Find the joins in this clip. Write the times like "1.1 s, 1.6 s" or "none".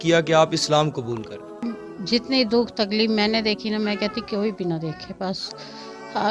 1.6 s